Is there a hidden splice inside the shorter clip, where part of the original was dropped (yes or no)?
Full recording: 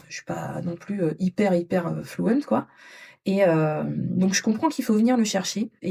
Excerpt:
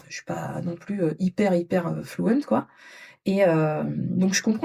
no